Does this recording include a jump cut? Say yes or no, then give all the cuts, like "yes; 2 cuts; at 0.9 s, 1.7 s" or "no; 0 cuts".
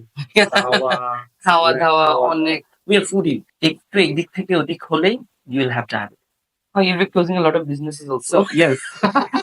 yes; 1 cut; at 3.5 s